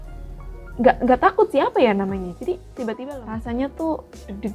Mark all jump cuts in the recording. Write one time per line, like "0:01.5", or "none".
0:03.0